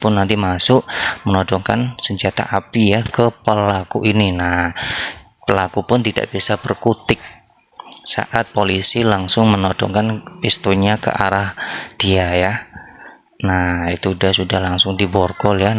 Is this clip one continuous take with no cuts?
yes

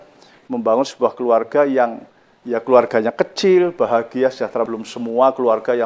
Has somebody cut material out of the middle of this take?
yes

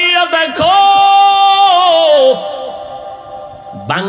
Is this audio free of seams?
yes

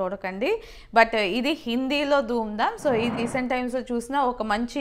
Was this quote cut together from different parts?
yes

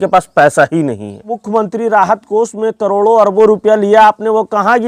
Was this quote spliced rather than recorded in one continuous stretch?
yes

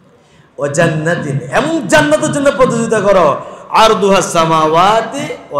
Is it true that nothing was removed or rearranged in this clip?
yes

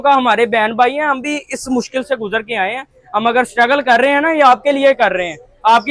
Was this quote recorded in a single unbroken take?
yes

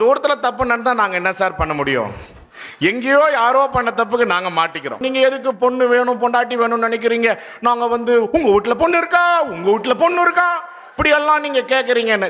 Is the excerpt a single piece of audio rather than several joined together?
no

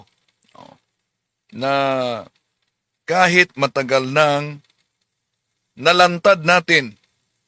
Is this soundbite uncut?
yes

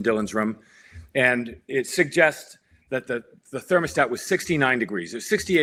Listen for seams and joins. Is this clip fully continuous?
yes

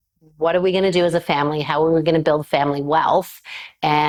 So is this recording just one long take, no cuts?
yes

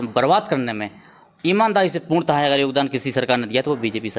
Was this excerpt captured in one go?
yes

